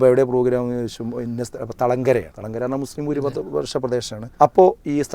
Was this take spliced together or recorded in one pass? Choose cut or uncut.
cut